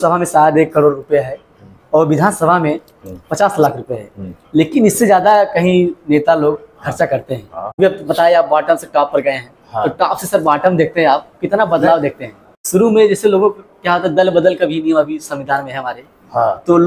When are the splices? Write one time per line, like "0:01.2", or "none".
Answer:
0:07.8
0:12.5

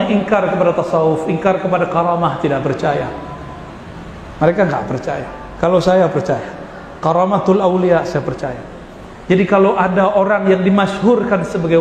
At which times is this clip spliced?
none

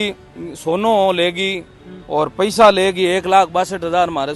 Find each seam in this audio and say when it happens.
none

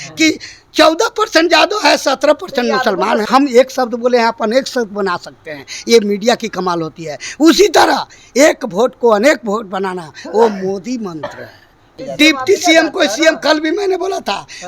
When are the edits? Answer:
0:03.2
0:11.9

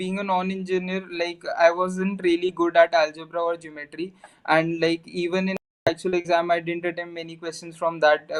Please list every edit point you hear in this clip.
none

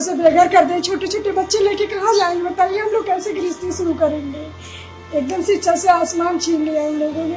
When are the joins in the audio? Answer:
none

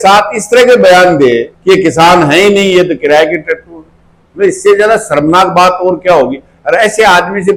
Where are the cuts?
none

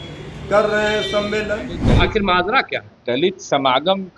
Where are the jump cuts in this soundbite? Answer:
0:01.8

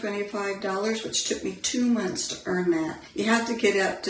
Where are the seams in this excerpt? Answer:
0:03.0

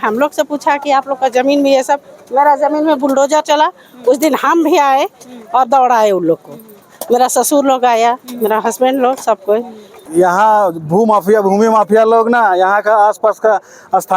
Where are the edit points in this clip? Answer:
0:10.0

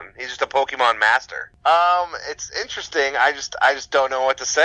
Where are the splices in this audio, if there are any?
0:01.4

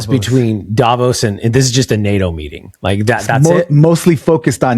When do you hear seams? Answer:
none

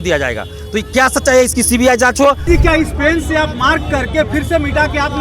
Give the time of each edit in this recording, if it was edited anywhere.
0:02.4

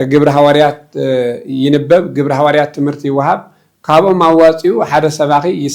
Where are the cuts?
none

